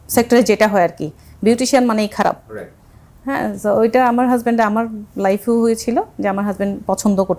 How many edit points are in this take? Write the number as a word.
zero